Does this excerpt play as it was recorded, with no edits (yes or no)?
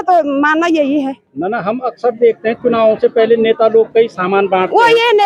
yes